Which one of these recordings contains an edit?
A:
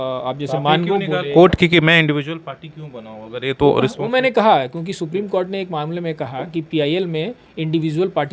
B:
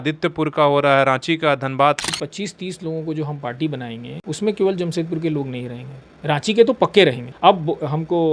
B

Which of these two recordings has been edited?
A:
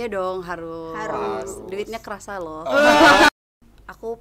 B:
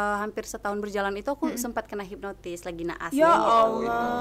A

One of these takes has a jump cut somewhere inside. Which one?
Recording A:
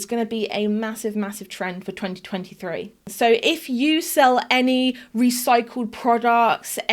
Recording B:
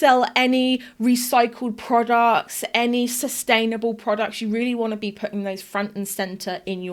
A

